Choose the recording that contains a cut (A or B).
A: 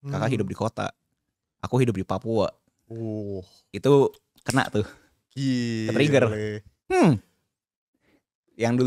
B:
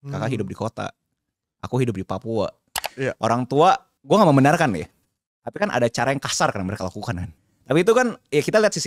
B